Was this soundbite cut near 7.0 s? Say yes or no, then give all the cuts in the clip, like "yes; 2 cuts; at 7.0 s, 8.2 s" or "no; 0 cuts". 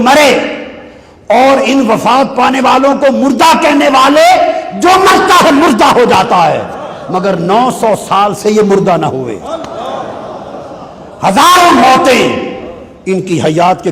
no; 0 cuts